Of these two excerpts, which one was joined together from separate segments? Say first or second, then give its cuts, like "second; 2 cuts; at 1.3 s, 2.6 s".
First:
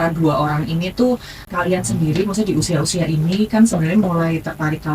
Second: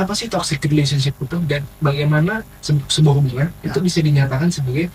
first; 1 cut; at 1.4 s